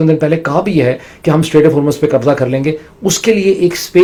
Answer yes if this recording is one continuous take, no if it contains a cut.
yes